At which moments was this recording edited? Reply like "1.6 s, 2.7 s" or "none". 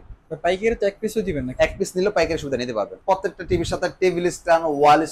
3.0 s